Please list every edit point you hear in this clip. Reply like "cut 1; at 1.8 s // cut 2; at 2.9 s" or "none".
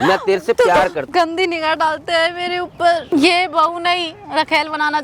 cut 1; at 1.0 s // cut 2; at 3.0 s